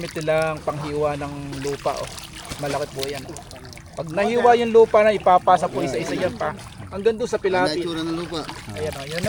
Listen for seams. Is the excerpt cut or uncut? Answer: uncut